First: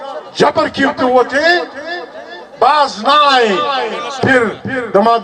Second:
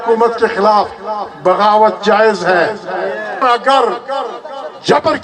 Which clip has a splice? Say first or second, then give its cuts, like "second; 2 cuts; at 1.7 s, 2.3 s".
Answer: second; 1 cut; at 3.4 s